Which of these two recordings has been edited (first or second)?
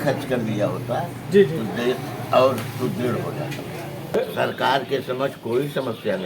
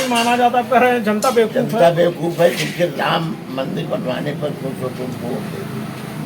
first